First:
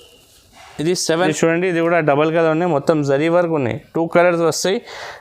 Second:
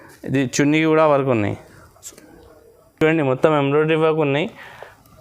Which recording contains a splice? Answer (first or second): first